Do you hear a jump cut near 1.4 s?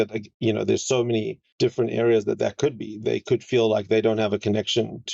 yes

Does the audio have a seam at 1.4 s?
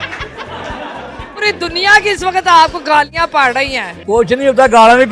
yes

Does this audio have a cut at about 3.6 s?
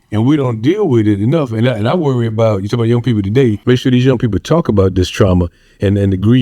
yes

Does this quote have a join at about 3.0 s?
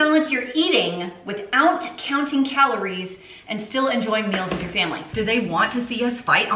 no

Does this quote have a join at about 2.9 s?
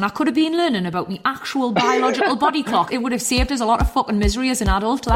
yes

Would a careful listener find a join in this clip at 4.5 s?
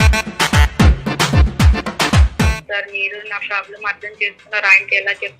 no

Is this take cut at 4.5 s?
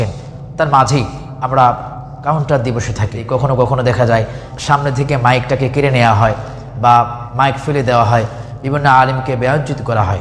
yes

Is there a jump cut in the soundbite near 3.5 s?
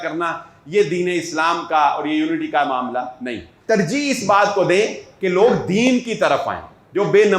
yes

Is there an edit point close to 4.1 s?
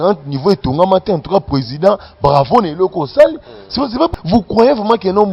yes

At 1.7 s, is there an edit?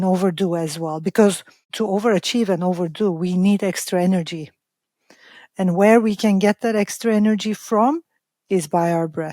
yes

